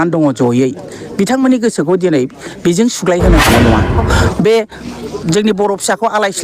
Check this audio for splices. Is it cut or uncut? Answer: cut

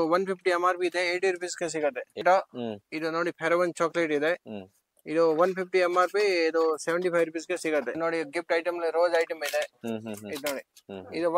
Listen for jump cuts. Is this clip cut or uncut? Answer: cut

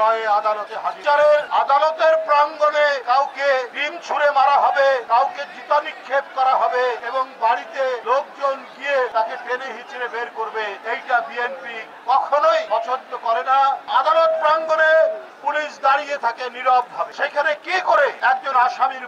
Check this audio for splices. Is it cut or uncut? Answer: cut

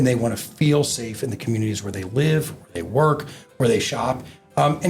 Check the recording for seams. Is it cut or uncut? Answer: uncut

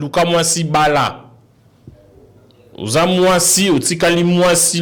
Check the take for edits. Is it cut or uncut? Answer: uncut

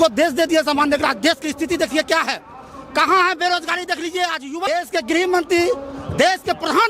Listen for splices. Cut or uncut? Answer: cut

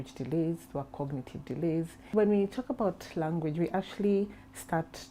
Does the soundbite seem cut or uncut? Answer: cut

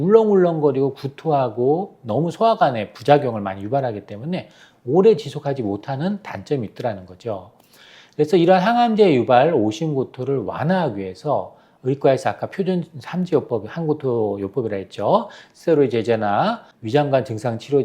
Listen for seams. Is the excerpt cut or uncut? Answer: cut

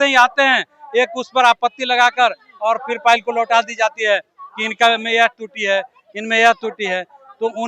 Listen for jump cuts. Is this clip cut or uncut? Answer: uncut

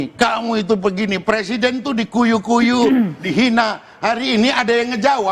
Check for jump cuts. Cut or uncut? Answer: uncut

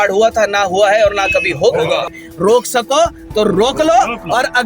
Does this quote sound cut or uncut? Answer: cut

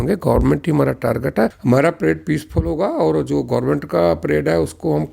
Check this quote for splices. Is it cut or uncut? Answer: cut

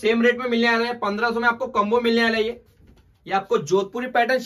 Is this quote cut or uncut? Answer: uncut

